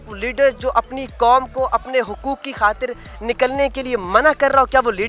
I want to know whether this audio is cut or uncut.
uncut